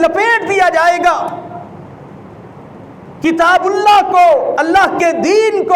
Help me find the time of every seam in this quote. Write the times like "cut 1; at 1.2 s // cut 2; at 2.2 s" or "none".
none

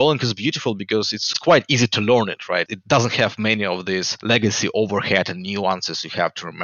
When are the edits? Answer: cut 1; at 1.2 s // cut 2; at 2.7 s // cut 3; at 4.1 s

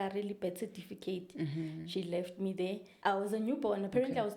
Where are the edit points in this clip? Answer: cut 1; at 2.9 s

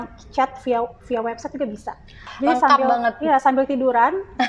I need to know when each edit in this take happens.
cut 1; at 2.2 s

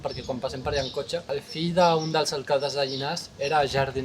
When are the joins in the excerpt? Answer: cut 1; at 1.3 s

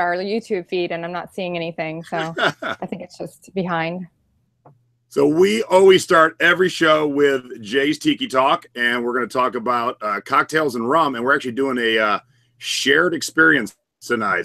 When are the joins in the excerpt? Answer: cut 1; at 9.8 s

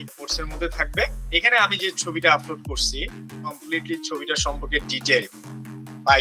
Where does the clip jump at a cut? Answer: cut 1; at 1.2 s

